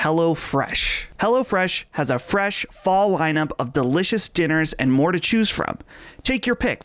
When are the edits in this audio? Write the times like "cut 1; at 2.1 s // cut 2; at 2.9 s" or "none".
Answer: cut 1; at 1.0 s